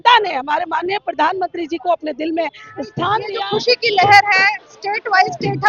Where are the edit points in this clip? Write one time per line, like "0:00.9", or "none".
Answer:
0:03.2